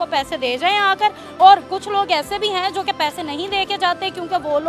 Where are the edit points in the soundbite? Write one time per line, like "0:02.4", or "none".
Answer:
none

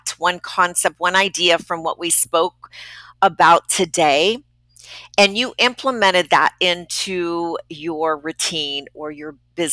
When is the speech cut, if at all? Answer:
none

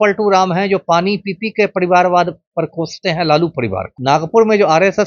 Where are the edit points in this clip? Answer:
0:03.9

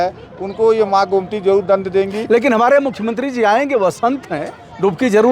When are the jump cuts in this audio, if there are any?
none

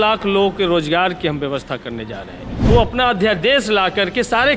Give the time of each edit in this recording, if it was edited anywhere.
0:02.5

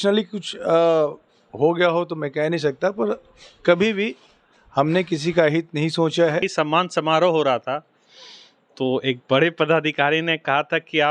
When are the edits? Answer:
0:06.5

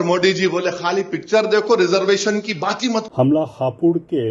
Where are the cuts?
0:03.1

